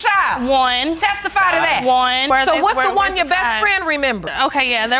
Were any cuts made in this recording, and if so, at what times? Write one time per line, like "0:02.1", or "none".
none